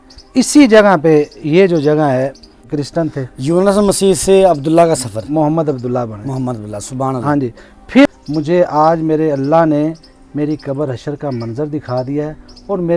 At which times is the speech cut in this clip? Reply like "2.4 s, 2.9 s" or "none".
2.7 s, 8.1 s